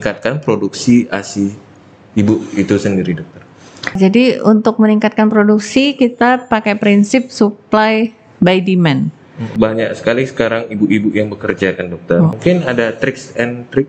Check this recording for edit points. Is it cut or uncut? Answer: cut